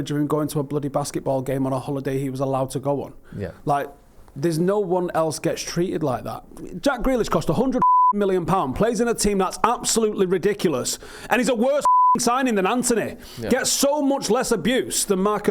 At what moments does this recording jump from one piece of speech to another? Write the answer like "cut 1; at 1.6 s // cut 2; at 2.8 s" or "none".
none